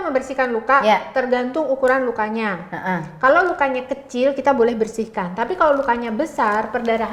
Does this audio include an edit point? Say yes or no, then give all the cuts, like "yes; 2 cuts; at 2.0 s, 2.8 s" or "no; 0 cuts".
no; 0 cuts